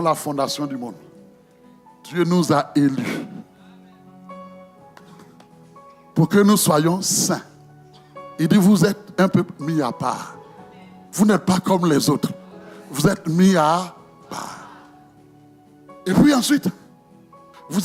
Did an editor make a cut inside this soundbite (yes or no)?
no